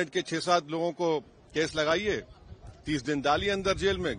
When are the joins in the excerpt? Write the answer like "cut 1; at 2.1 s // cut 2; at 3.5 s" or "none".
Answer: none